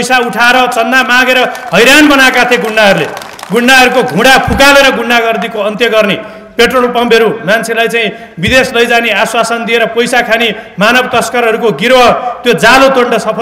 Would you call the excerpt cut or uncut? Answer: uncut